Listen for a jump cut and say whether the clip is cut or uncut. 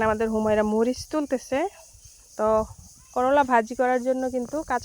uncut